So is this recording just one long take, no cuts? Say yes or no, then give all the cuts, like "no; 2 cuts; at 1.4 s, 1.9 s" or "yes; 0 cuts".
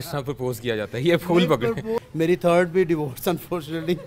no; 1 cut; at 2.0 s